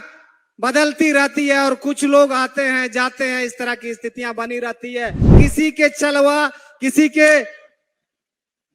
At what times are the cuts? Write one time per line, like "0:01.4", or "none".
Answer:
0:05.4